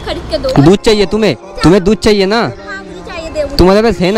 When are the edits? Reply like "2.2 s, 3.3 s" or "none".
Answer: 1.5 s